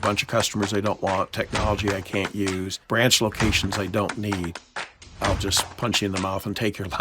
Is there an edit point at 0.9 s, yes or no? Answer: no